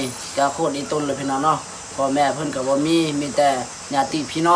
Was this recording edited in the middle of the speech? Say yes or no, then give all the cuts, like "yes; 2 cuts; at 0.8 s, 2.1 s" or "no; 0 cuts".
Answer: no; 0 cuts